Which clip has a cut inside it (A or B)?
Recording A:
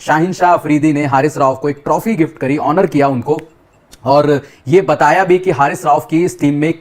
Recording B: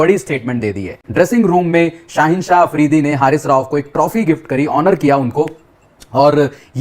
B